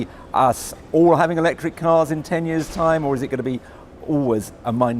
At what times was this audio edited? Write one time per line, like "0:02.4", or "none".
0:02.2